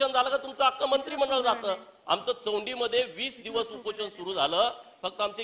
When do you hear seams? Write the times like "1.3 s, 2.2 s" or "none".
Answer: none